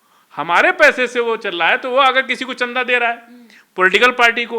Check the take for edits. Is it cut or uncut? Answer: uncut